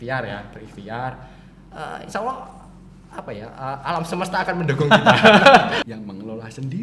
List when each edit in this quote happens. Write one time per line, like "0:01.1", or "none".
0:05.8